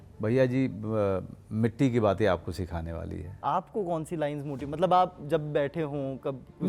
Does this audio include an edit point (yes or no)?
yes